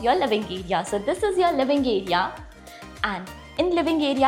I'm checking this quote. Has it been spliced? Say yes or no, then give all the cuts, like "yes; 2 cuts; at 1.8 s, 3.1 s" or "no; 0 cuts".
no; 0 cuts